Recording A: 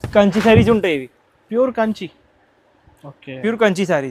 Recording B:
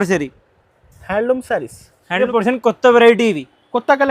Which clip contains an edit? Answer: B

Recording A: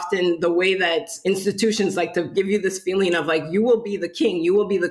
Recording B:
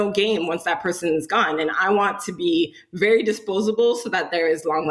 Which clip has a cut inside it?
A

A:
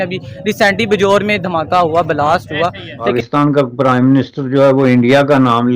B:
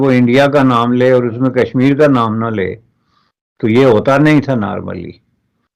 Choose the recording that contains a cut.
A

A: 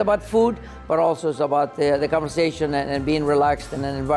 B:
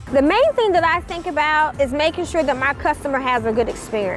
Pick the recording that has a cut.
B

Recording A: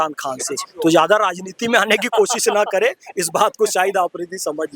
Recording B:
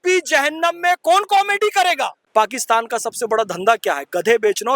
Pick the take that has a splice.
B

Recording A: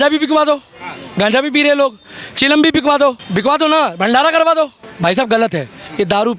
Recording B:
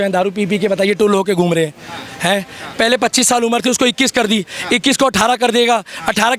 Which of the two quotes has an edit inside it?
A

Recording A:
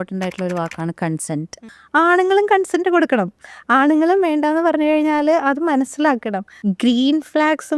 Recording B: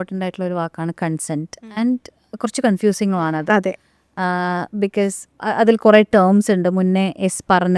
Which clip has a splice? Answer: A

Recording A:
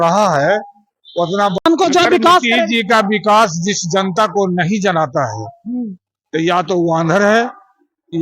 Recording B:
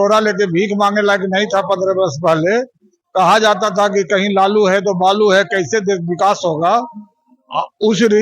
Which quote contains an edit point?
A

